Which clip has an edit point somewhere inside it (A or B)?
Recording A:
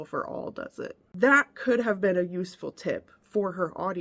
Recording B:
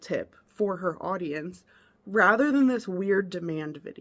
A